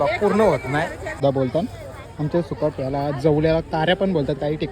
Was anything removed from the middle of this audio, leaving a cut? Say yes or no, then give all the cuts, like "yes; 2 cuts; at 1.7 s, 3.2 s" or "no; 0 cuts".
yes; 1 cut; at 1.2 s